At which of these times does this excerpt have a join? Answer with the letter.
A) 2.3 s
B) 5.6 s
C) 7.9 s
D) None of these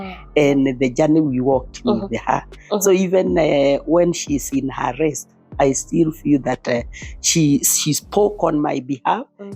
D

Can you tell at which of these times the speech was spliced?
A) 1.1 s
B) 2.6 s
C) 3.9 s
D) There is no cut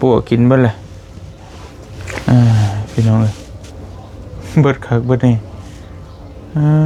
D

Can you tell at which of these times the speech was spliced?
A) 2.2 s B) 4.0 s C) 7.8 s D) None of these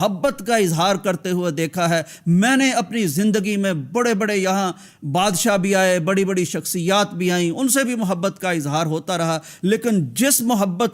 D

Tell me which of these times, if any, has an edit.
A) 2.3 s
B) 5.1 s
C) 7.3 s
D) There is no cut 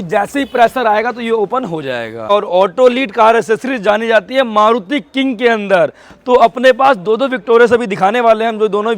A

